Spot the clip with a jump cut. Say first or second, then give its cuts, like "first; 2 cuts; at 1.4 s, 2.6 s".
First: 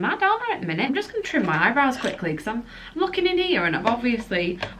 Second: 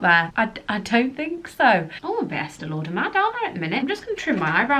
second; 1 cut; at 1.9 s